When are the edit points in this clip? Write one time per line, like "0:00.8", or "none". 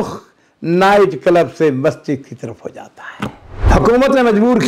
0:03.7

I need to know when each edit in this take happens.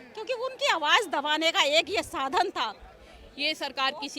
0:02.9

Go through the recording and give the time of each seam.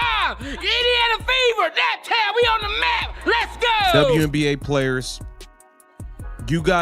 0:04.1

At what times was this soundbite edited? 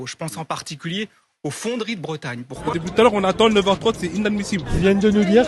0:02.6

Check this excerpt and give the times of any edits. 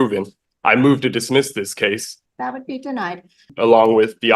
0:02.1
0:03.5

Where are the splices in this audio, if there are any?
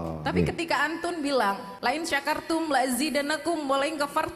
0:01.7

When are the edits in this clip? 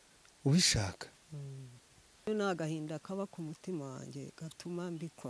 0:02.3

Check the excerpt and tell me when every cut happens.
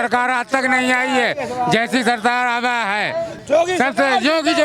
0:03.3

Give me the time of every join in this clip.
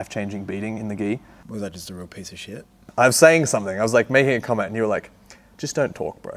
0:01.4
0:02.8

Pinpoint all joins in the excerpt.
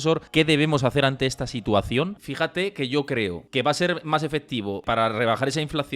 0:02.2
0:03.4
0:04.8

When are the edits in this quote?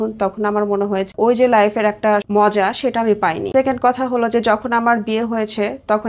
0:01.1
0:02.3
0:03.4

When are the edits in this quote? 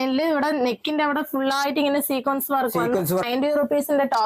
0:03.3

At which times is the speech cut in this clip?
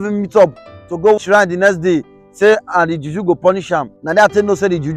0:01.2
0:04.0

